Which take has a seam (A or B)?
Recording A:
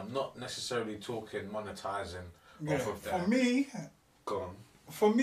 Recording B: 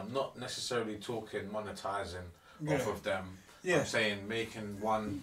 A